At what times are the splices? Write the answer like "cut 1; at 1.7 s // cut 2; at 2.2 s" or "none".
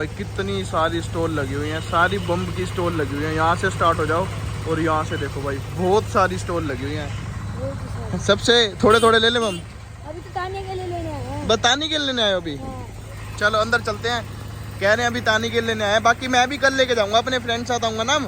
none